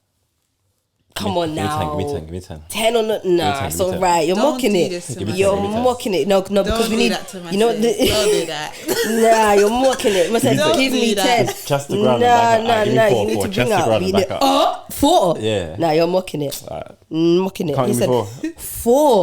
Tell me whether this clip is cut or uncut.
uncut